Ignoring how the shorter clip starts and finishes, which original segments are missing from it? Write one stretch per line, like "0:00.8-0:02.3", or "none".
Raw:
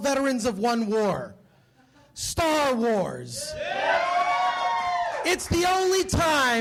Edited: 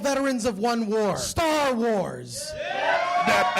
0:01.3-0:02.3

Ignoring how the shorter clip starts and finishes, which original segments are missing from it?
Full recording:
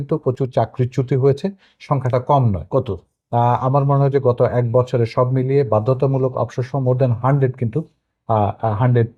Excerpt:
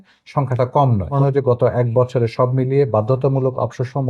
0:02.7-0:03.9

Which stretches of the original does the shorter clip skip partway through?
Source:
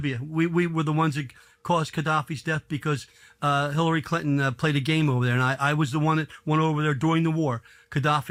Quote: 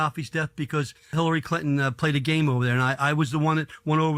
0:03.2-0:03.7

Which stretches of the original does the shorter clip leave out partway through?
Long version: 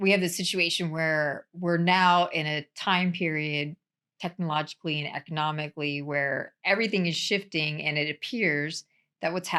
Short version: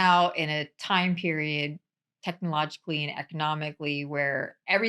none

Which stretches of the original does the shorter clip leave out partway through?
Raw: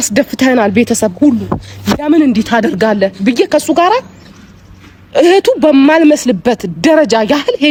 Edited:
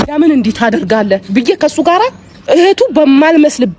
0:04.2-0:04.9

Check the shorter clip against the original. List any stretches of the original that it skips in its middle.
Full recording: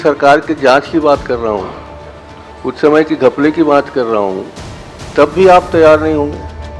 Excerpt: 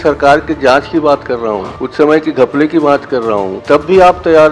0:01.8-0:02.6
0:04.4-0:05.0

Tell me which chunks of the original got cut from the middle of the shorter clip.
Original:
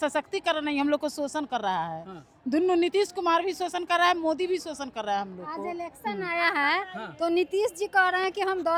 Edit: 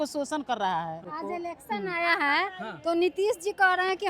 0:02.1-0:05.4

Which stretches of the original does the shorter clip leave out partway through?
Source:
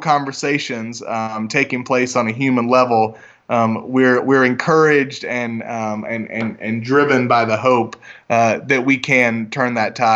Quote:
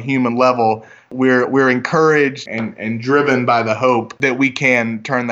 0:03.4-0:03.8
0:05.2-0:06.3
0:08.0-0:08.6

